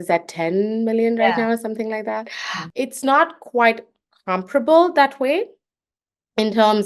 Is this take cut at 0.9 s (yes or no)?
no